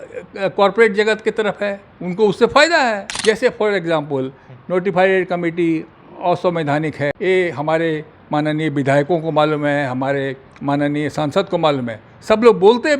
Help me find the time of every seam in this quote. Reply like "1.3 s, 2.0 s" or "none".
3.1 s, 7.2 s